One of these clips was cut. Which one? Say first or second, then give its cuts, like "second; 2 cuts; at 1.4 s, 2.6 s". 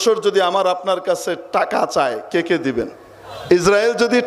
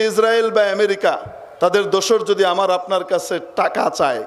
first; 1 cut; at 3.3 s